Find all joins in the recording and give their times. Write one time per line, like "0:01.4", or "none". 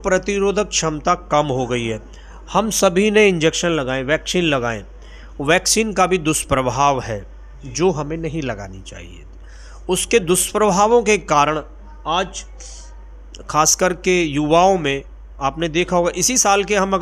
none